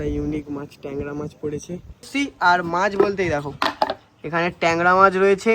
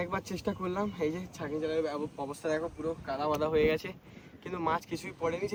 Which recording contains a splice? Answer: first; 1 cut; at 2.1 s

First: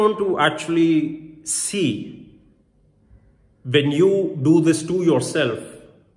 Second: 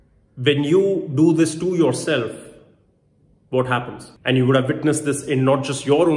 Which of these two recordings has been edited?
second; 1 cut; at 4.0 s

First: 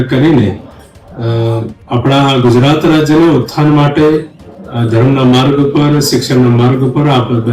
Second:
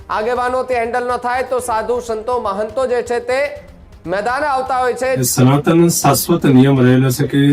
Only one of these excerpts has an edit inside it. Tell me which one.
second; 1 cut; at 5.2 s

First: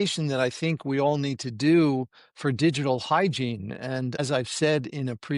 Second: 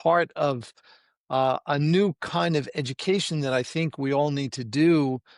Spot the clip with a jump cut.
first; 1 cut; at 4.2 s

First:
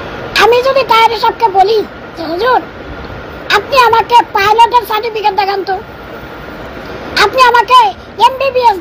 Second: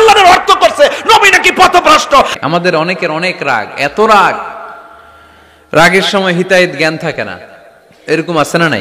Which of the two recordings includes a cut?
second; 1 cut; at 2.3 s

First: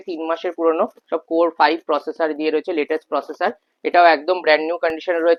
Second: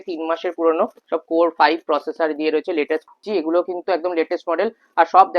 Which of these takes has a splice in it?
second; 1 cut; at 3.2 s

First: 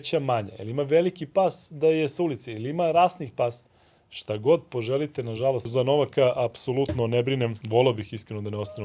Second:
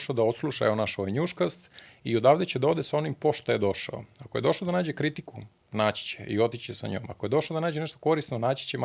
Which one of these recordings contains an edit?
first; 2 cuts; at 5.7 s, 7.6 s

